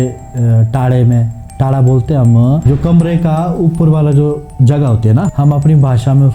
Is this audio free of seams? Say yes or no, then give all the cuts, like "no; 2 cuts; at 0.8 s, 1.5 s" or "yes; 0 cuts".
no; 2 cuts; at 2.6 s, 5.3 s